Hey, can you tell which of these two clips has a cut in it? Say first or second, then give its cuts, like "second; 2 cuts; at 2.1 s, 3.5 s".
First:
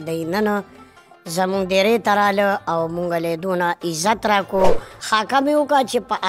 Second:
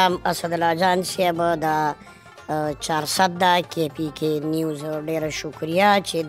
first; 1 cut; at 4.9 s